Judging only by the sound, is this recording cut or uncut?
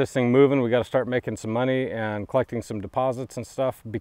uncut